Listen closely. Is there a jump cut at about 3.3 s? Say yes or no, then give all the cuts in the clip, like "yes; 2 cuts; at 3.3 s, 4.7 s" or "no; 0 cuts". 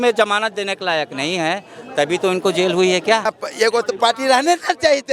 yes; 1 cut; at 3.3 s